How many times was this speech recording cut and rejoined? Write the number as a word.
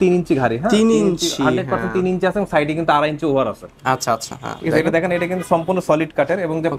zero